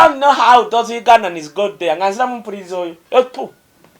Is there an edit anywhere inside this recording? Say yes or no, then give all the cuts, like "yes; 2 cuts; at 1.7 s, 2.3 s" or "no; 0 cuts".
yes; 1 cut; at 3.0 s